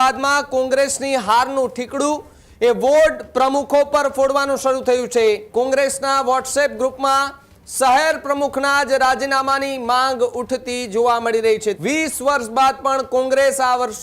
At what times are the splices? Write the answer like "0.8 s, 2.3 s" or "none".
5.4 s, 11.8 s